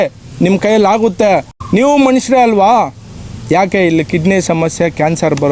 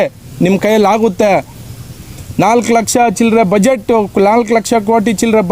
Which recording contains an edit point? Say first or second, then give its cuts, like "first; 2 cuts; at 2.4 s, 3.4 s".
first; 1 cut; at 1.5 s